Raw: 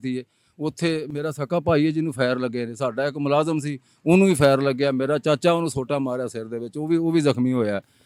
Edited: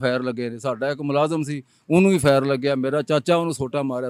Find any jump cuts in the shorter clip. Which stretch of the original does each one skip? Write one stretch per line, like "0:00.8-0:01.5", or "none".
none